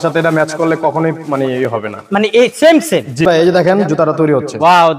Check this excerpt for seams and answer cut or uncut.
cut